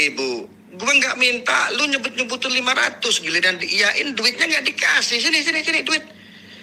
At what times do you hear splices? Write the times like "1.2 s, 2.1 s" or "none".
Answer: none